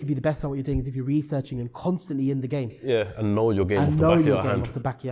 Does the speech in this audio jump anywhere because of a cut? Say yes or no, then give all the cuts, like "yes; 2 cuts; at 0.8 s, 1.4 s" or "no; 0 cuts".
no; 0 cuts